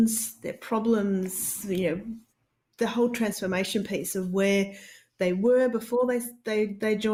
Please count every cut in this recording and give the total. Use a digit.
0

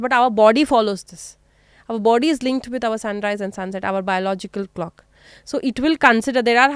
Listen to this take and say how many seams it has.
0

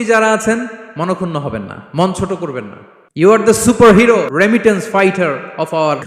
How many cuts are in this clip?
2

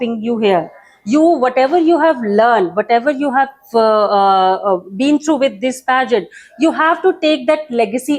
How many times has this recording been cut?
0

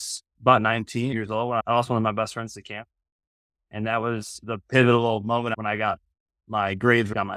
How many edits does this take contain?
2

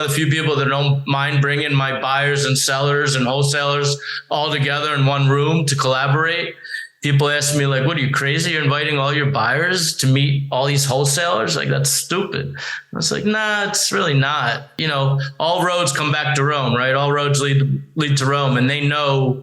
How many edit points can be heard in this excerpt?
1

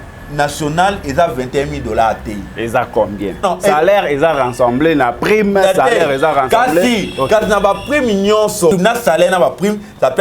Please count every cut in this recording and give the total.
2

